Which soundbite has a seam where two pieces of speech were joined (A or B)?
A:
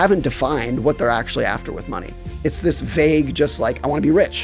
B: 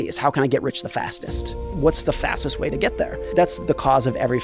B